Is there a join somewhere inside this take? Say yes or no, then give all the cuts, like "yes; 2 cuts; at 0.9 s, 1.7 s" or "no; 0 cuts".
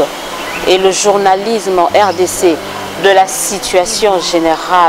no; 0 cuts